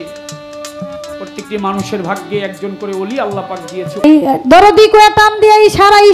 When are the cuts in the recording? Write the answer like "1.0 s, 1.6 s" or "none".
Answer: 4.0 s